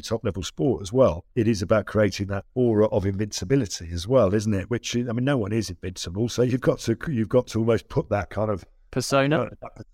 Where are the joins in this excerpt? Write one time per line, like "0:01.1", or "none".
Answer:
0:01.2
0:02.4
0:04.6
0:08.8